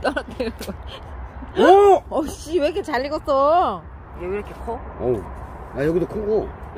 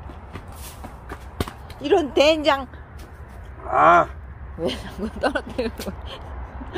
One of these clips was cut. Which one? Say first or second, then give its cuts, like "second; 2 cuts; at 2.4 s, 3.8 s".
first; 1 cut; at 4.0 s